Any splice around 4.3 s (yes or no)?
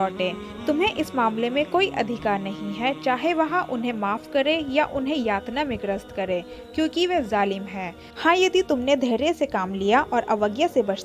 no